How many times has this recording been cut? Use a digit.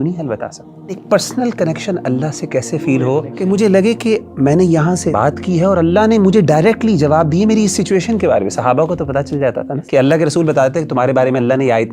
4